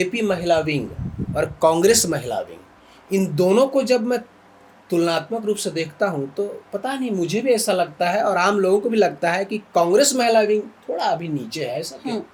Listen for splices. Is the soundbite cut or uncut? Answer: uncut